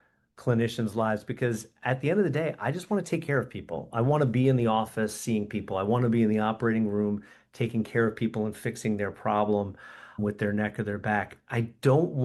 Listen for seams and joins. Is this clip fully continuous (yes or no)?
yes